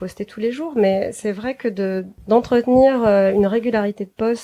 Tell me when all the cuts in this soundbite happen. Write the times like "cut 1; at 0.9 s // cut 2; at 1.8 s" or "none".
cut 1; at 2.1 s